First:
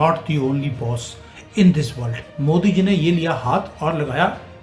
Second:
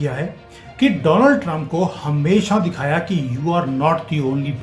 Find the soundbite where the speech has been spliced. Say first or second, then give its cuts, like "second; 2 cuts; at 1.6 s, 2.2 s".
first; 1 cut; at 2.3 s